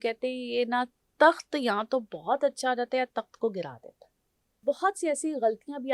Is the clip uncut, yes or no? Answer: no